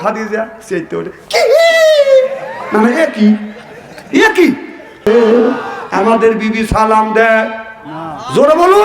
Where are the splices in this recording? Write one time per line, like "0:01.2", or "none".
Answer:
0:05.1